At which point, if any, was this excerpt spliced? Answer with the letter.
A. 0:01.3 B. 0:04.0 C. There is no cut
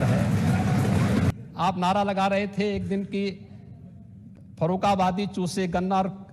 A